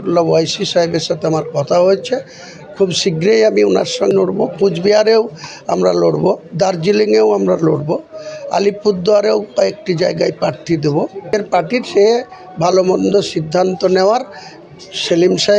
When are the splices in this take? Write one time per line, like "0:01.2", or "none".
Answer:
0:04.1
0:11.3